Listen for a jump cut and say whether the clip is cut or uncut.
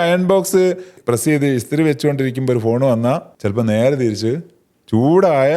cut